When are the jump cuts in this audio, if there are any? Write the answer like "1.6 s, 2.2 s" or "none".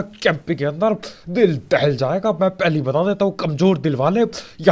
none